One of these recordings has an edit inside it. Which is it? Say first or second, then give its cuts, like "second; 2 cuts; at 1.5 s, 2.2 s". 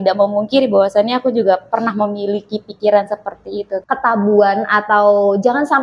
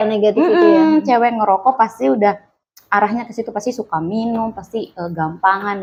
first; 1 cut; at 3.8 s